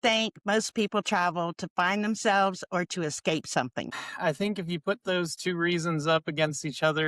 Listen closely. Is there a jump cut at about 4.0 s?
yes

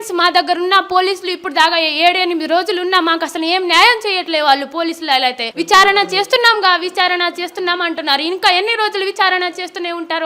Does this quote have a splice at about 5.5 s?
yes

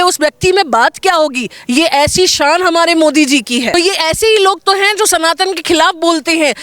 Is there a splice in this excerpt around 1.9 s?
no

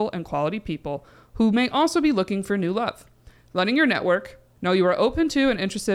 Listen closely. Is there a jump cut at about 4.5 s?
yes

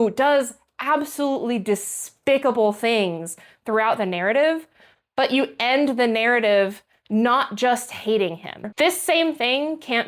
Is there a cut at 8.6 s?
yes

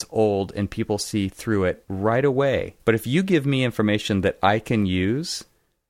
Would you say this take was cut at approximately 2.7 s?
yes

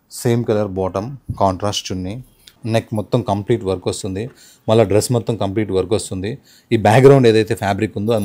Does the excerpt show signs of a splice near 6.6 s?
no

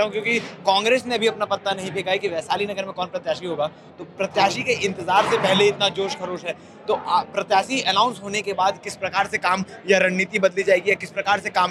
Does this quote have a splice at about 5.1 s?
no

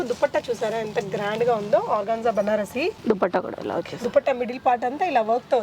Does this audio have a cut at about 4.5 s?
no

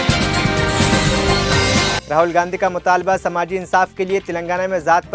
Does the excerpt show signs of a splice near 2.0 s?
yes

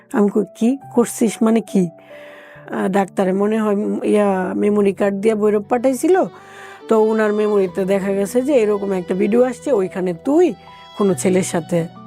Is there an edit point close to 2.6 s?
yes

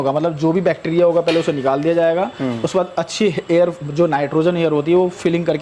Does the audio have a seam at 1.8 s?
no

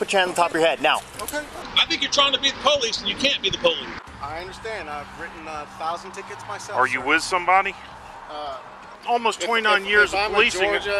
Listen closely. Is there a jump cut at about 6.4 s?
no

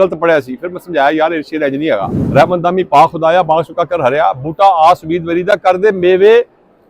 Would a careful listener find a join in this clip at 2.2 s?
yes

